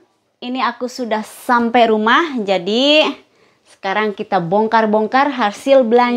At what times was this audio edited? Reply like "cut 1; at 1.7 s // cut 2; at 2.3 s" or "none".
none

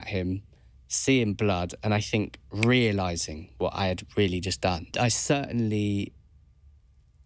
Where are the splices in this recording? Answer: cut 1; at 4.9 s

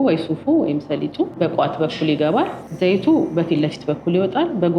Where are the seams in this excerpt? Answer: cut 1; at 1.3 s // cut 2; at 2.7 s

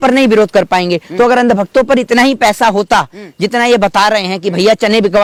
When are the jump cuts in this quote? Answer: none

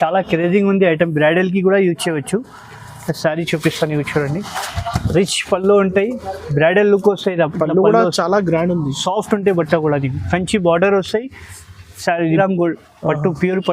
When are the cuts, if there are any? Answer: cut 1; at 12.4 s

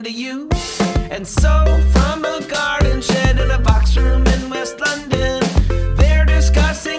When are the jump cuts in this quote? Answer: none

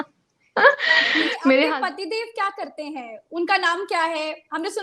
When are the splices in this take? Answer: cut 1; at 1.7 s

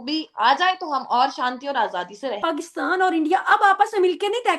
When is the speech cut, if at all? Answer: cut 1; at 2.4 s

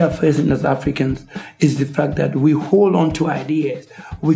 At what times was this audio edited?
none

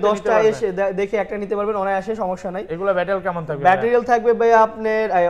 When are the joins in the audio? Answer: none

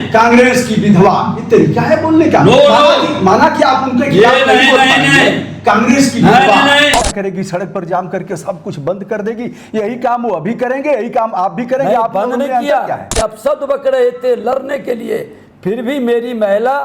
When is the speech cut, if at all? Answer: cut 1; at 7.0 s // cut 2; at 13.2 s

